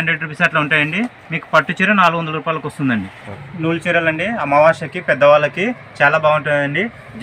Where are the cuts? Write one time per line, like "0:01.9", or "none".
0:03.3